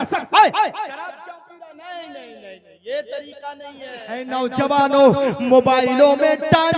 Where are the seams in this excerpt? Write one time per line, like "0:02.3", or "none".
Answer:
0:04.3